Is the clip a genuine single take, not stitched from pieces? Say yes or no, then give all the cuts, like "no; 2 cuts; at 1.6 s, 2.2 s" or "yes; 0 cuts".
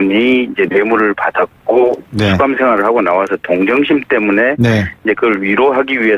no; 1 cut; at 4.4 s